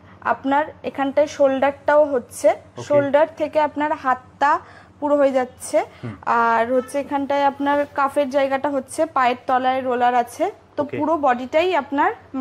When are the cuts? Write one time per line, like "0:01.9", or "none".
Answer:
none